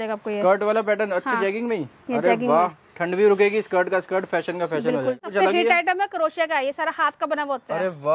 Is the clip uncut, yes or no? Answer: no